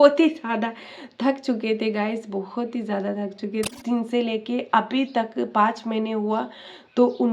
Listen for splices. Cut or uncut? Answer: cut